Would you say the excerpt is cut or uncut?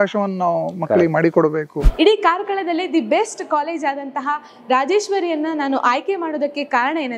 cut